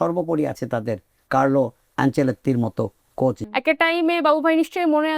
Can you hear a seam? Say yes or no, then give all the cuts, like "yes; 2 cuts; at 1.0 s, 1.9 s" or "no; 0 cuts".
yes; 1 cut; at 3.4 s